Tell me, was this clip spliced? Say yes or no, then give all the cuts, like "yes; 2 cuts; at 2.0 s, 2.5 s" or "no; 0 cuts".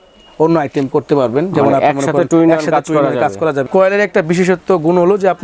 yes; 1 cut; at 3.7 s